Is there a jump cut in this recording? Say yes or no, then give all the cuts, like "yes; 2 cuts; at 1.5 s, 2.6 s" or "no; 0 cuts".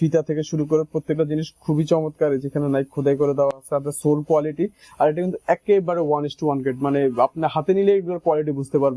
no; 0 cuts